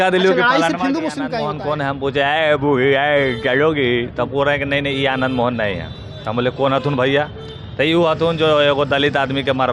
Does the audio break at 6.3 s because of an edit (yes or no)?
no